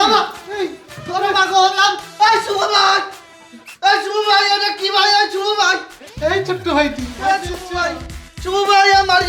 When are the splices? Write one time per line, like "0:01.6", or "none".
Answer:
none